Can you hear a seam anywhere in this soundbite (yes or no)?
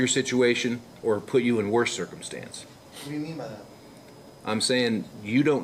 no